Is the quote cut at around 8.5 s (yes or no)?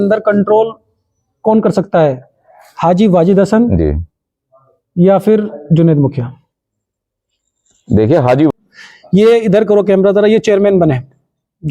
yes